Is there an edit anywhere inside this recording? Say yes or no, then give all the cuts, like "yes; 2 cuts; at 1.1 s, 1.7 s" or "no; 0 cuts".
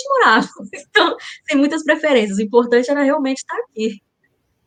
no; 0 cuts